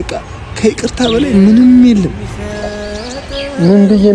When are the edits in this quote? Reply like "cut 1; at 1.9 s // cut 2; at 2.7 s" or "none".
cut 1; at 2.7 s